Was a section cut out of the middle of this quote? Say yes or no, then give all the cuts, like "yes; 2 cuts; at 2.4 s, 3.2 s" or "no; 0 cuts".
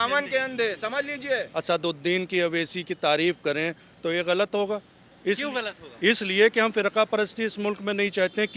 yes; 1 cut; at 1.5 s